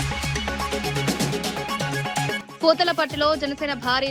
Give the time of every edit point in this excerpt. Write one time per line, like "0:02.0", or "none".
0:02.4